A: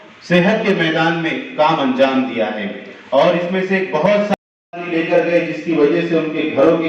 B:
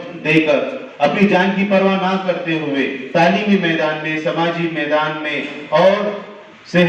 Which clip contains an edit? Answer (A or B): A